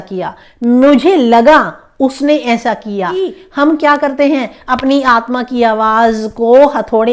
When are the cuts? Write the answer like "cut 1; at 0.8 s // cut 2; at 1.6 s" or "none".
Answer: cut 1; at 3.4 s